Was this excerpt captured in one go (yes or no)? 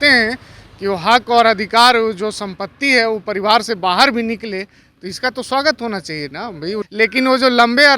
no